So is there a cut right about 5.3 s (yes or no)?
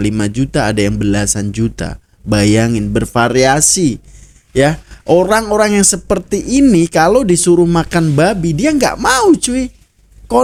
no